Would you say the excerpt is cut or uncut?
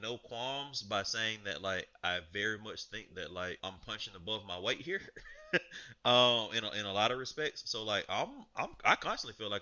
cut